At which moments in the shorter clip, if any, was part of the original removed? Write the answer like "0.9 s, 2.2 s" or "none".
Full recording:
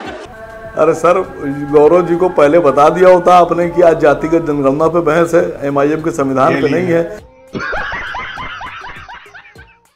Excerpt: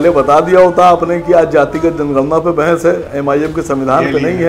none